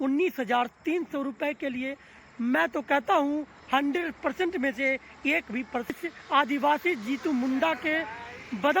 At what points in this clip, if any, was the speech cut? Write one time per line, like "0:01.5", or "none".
0:05.9